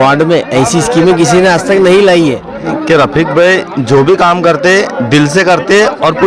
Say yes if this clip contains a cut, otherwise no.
yes